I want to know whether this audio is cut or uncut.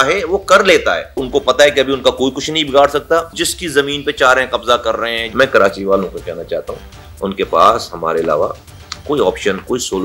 cut